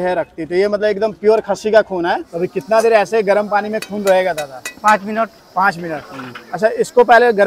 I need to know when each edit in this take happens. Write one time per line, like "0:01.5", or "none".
0:02.3